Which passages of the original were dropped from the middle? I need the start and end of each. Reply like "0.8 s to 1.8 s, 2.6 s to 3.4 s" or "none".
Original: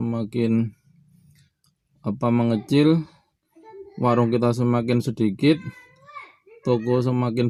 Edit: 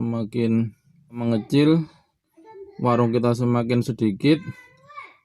1.2 s to 2.4 s